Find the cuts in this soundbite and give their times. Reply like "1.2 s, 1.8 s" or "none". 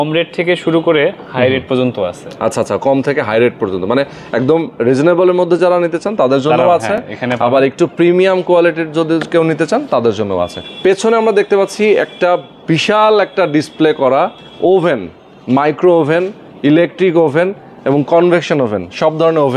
none